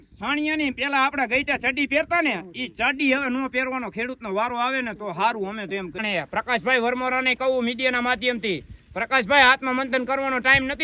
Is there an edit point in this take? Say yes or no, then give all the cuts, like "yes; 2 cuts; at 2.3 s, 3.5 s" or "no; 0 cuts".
yes; 1 cut; at 6.0 s